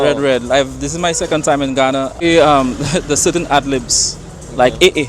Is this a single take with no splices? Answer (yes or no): no